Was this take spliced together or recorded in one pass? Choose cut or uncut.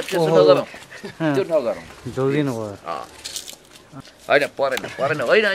cut